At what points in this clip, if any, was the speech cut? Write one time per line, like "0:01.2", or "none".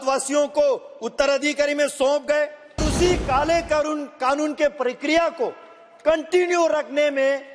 0:02.9